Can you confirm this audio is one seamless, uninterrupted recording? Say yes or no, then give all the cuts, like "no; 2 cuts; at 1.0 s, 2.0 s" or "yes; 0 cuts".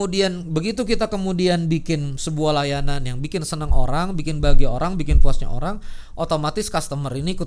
yes; 0 cuts